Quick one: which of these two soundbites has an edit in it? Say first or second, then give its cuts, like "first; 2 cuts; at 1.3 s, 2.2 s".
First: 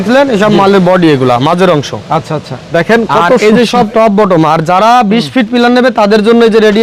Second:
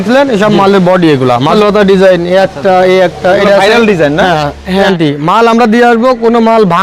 second; 2 cuts; at 1.5 s, 4.9 s